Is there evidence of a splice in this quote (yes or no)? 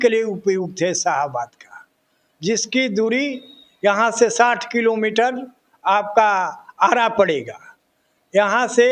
no